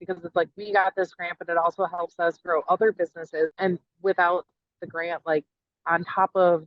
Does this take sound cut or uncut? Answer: cut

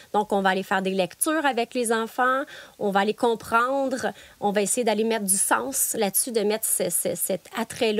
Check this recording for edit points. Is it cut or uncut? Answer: uncut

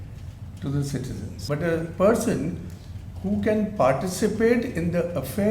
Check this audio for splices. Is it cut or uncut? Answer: cut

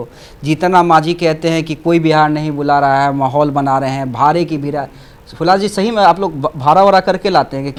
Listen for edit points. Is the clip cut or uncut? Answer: uncut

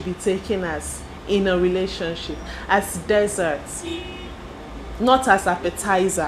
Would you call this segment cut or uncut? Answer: uncut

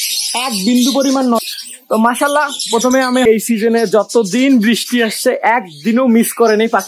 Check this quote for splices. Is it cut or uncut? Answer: cut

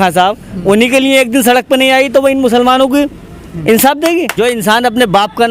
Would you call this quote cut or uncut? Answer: cut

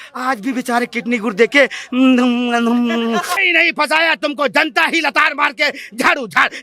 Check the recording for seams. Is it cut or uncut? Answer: cut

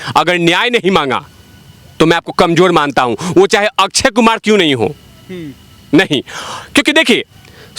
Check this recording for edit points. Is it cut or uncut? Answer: uncut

